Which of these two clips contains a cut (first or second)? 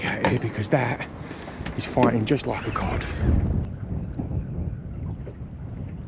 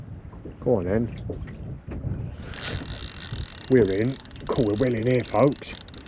first